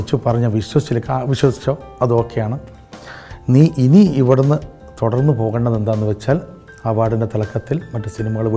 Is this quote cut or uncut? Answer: uncut